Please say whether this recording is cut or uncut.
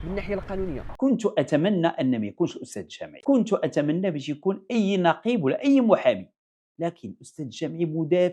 uncut